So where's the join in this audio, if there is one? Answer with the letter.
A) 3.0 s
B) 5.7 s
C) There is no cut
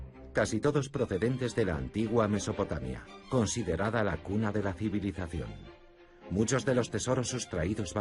B